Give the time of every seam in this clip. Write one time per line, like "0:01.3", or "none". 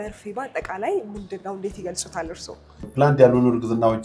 0:02.8